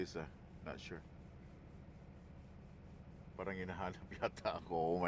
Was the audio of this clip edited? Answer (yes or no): no